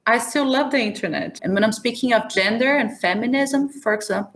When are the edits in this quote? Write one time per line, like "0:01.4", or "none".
0:01.3